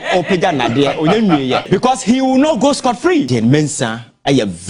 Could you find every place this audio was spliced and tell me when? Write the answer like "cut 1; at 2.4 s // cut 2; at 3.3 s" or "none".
cut 1; at 1.6 s // cut 2; at 3.3 s